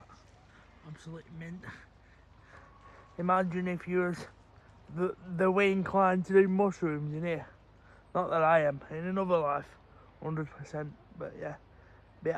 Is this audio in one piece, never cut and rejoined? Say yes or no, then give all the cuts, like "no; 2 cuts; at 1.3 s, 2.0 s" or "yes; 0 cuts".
yes; 0 cuts